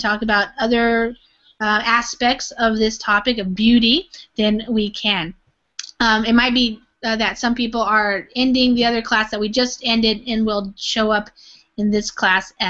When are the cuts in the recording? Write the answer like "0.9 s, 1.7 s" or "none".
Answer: 7.2 s